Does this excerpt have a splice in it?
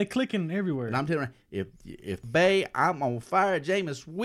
yes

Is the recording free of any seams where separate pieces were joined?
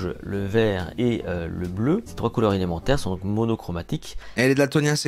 no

